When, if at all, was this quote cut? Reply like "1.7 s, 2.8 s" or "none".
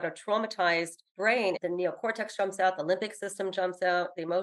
1.5 s